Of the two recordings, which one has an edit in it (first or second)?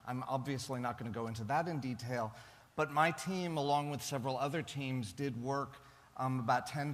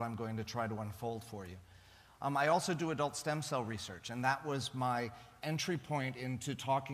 second